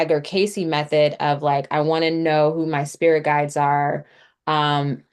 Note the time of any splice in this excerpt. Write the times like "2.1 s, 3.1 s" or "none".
none